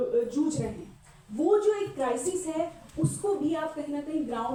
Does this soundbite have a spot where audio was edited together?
no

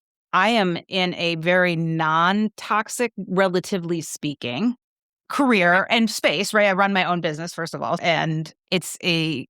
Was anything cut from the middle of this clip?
yes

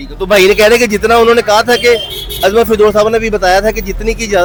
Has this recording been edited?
no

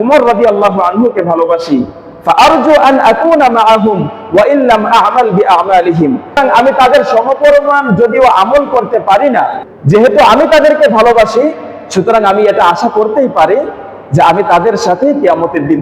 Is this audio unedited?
no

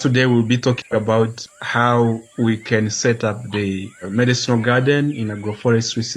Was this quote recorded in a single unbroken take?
no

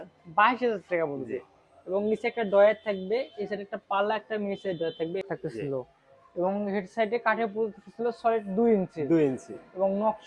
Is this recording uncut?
no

